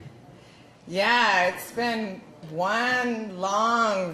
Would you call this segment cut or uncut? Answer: cut